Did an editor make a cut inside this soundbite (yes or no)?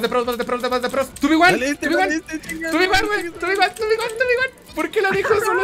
yes